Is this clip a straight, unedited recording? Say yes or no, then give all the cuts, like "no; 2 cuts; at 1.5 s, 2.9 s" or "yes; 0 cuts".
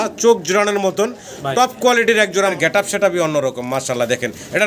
no; 1 cut; at 2.5 s